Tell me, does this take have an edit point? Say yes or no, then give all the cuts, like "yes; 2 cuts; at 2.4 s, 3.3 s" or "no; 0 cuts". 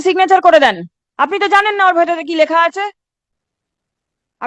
no; 0 cuts